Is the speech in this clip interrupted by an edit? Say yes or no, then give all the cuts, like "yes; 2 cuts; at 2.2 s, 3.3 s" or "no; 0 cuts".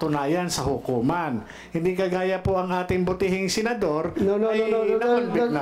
no; 0 cuts